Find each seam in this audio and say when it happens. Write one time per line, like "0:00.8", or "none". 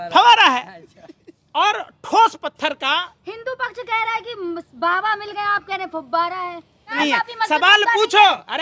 0:07.0